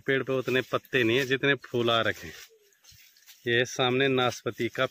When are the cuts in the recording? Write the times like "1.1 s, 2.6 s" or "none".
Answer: none